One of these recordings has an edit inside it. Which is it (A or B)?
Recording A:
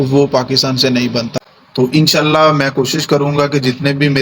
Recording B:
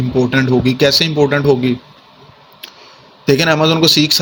A